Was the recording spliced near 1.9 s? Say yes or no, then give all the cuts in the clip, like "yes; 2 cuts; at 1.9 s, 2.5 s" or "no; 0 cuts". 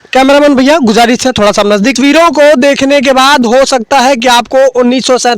yes; 1 cut; at 1.9 s